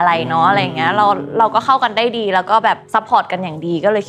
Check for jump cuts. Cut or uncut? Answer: uncut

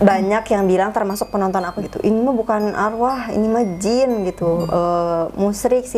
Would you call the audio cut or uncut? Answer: cut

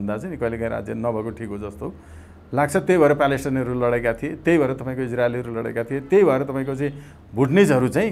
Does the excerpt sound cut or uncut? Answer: uncut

